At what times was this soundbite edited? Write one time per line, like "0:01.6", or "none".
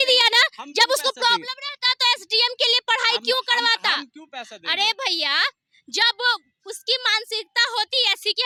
none